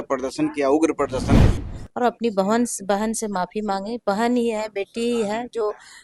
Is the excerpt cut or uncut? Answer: cut